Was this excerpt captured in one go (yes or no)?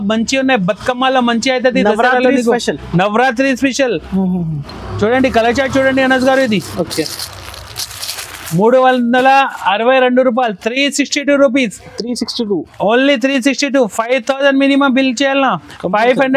yes